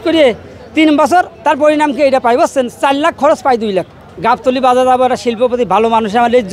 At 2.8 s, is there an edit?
no; 1 cut; at 4.0 s

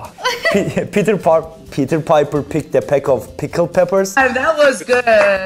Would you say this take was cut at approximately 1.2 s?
no; 1 cut; at 4.4 s

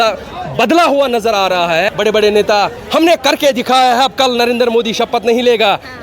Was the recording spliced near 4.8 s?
no; 1 cut; at 1.9 s

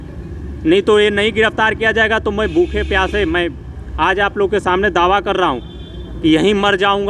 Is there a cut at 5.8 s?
no; 0 cuts

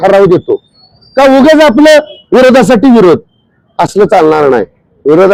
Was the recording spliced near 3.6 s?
no; 0 cuts

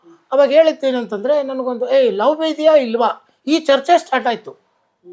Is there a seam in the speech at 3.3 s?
no; 0 cuts

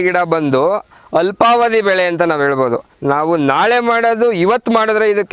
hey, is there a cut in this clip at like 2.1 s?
no; 0 cuts

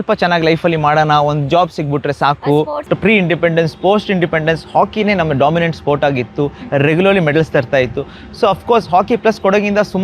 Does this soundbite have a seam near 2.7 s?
yes; 1 cut; at 2.7 s

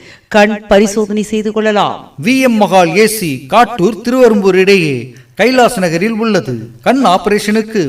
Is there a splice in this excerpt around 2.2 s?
no; 1 cut; at 5.8 s

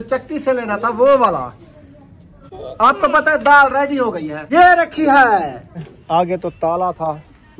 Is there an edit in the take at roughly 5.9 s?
yes; 2 cuts; at 4.3 s, 5.9 s

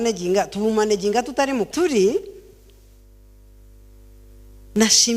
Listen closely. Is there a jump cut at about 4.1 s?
no; 1 cut; at 1.7 s

